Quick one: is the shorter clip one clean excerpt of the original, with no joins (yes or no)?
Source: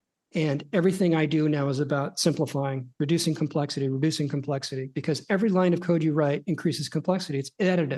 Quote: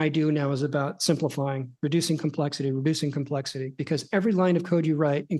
yes